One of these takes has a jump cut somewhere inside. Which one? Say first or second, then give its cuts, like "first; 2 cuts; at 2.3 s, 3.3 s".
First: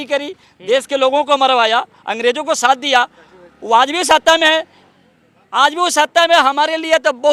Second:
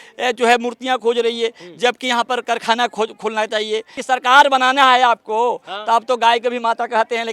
second; 1 cut; at 4.0 s